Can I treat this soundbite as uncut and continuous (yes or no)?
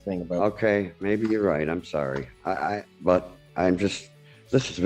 yes